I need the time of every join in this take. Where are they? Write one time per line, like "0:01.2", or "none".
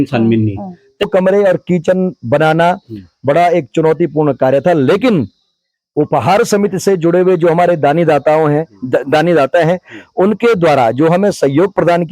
0:01.1